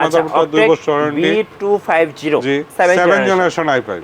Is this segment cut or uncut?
cut